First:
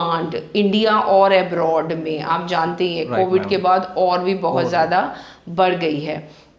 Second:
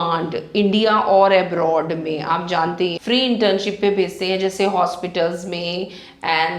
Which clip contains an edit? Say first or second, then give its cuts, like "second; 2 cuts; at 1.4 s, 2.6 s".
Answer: second; 1 cut; at 3.0 s